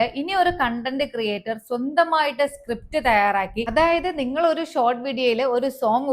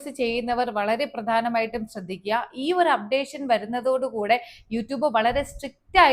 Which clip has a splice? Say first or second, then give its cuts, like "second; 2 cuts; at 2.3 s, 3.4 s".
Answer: first; 1 cut; at 3.6 s